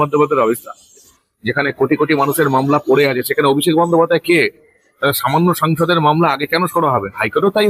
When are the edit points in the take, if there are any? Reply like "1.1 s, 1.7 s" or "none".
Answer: 1.1 s